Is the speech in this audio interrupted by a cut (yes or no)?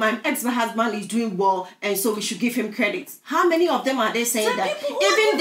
no